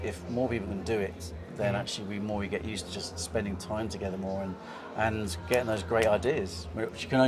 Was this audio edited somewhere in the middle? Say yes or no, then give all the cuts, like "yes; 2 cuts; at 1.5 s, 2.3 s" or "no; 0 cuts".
no; 0 cuts